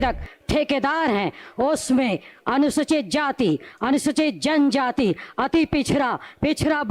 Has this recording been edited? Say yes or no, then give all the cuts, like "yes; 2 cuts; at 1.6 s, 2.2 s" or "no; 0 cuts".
no; 0 cuts